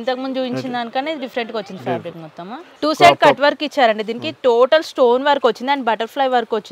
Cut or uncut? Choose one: cut